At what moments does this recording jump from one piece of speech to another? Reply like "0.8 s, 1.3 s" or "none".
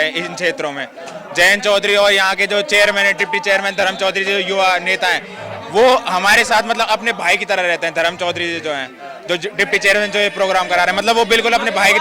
none